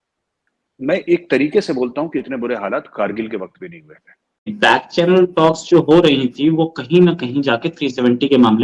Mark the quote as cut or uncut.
cut